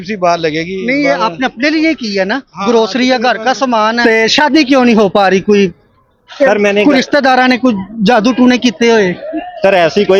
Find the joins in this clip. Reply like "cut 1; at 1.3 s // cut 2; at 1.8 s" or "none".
cut 1; at 4.0 s